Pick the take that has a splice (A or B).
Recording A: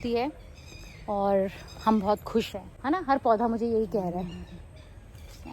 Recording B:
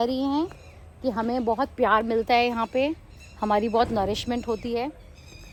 A